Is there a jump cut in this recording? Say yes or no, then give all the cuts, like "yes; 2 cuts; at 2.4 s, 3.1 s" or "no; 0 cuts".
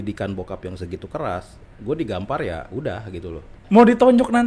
yes; 1 cut; at 3.5 s